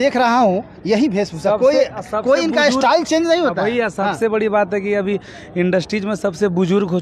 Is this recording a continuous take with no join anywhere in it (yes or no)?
yes